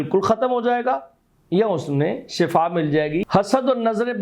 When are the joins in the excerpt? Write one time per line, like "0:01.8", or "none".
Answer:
0:03.2

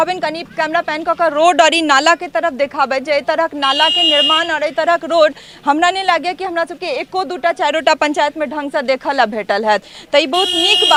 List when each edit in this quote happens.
none

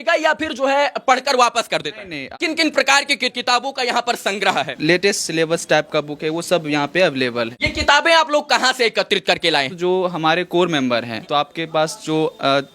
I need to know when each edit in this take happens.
0:02.3
0:03.3
0:04.7
0:07.6
0:09.7
0:11.2

